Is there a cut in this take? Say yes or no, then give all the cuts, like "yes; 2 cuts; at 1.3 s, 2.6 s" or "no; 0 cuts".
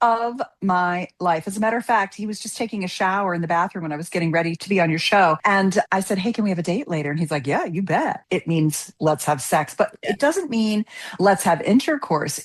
yes; 2 cuts; at 5.4 s, 8.2 s